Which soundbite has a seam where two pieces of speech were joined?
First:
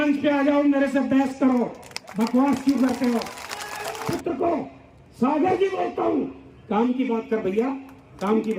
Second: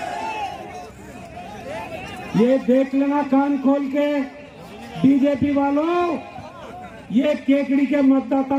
first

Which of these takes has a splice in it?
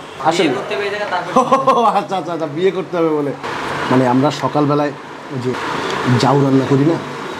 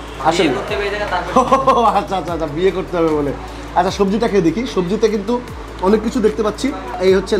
first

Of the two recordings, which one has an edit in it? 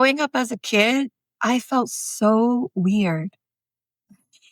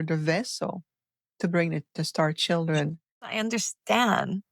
second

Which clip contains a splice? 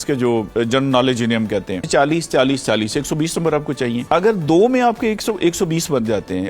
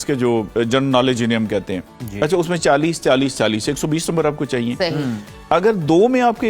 first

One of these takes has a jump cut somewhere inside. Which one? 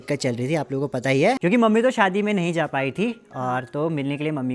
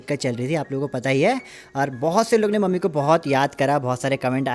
first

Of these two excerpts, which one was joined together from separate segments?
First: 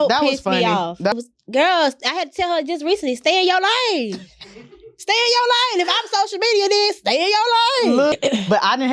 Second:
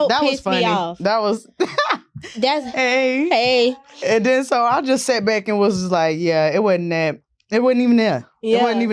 first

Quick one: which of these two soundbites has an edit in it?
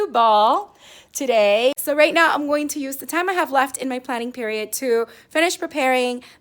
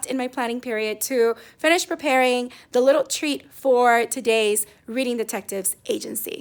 first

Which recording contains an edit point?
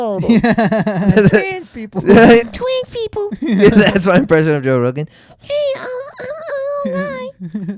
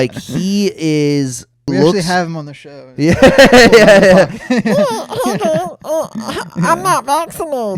second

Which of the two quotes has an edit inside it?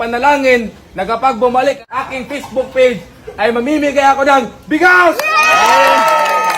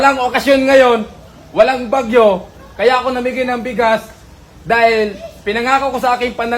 first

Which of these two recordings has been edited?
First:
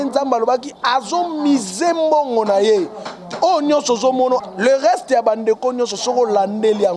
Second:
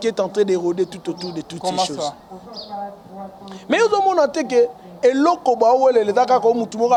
first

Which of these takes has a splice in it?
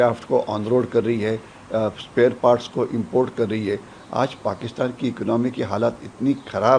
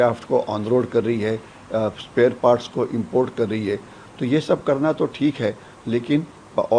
first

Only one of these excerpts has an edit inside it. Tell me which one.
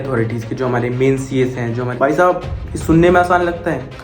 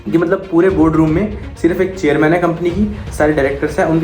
first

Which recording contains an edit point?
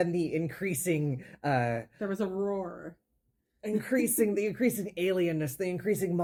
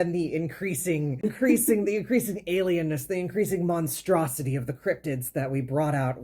second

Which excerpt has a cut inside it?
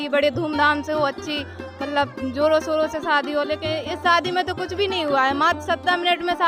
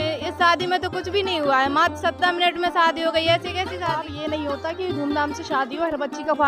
second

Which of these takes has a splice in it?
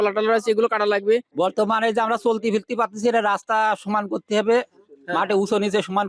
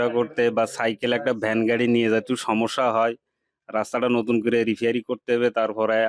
first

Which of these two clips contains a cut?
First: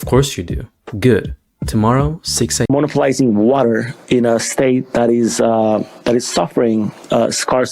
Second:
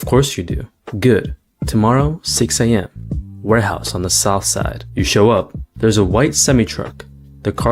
first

